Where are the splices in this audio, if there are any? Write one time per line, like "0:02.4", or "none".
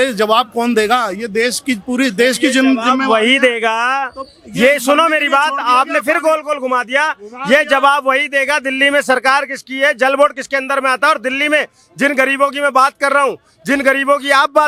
none